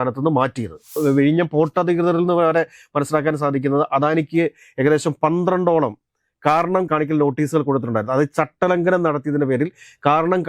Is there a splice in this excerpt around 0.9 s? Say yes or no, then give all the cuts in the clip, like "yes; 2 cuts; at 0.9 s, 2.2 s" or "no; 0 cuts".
yes; 1 cut; at 0.9 s